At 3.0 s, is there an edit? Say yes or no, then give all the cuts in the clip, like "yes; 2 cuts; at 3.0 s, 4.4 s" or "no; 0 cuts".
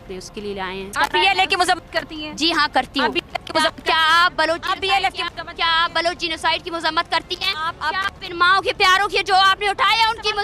no; 1 cut; at 0.9 s